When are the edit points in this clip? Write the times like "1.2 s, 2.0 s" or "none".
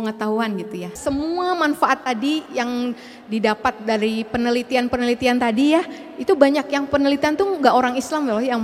0.9 s